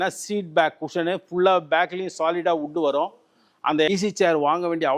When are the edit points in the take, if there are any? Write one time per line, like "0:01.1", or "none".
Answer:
0:03.9